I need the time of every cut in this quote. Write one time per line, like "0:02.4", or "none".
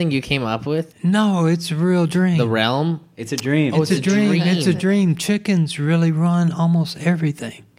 0:00.9